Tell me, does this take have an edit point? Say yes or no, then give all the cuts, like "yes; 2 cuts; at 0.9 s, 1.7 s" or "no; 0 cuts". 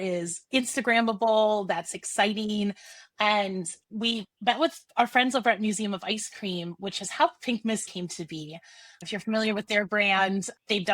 yes; 2 cuts; at 4.9 s, 7.9 s